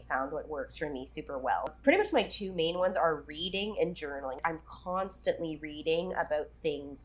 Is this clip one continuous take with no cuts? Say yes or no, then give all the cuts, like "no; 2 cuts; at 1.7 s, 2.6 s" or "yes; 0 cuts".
no; 2 cuts; at 1.7 s, 4.4 s